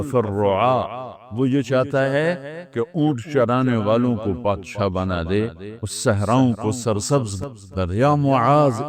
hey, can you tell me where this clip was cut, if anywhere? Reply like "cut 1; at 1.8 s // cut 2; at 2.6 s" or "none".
cut 1; at 7.6 s